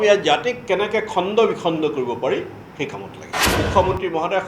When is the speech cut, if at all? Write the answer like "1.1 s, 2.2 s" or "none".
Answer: 3.4 s